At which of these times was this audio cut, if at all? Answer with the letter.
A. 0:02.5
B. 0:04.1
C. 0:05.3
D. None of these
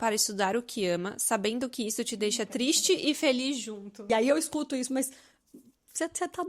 B